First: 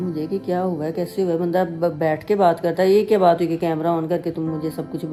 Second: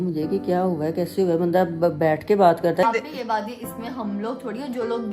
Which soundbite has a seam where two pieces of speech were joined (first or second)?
second